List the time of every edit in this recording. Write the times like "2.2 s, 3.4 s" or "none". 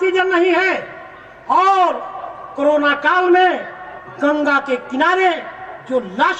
none

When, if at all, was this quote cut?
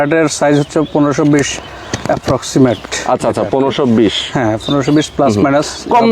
none

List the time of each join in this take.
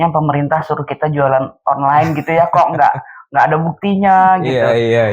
none

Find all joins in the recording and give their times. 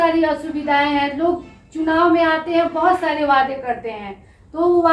none

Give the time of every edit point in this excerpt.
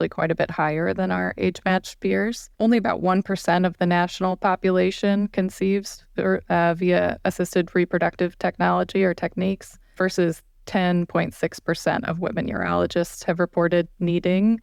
none

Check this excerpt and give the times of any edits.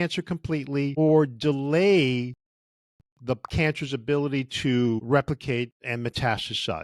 0.9 s, 5.0 s

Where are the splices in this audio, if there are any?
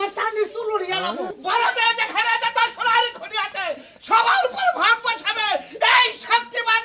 1.3 s

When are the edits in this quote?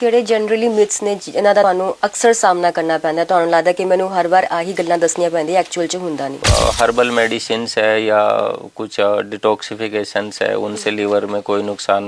1.6 s, 6.4 s

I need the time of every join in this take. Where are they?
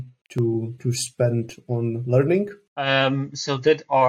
2.7 s

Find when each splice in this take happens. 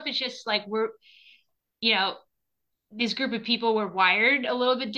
none

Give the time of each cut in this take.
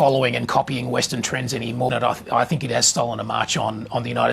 1.9 s

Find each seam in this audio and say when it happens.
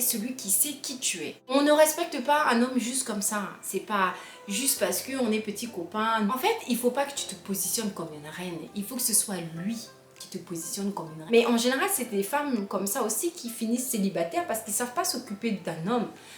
1.5 s, 6.3 s, 11.1 s

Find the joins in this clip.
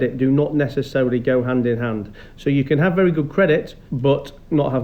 3.8 s

